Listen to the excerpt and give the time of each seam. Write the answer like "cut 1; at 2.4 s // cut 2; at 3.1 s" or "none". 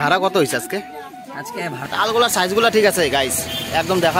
cut 1; at 1.9 s